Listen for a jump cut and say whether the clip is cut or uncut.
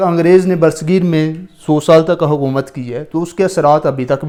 uncut